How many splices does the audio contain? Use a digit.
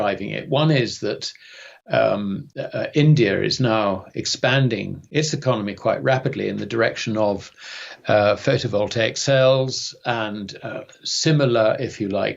0